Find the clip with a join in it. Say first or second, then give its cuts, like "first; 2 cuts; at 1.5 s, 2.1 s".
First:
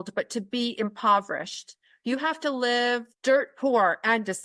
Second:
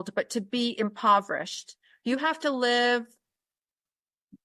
first; 1 cut; at 3.1 s